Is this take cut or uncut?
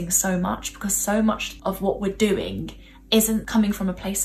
cut